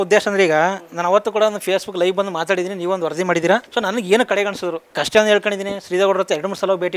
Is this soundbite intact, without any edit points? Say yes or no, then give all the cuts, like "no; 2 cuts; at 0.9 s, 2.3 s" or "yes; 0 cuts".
no; 1 cut; at 4.9 s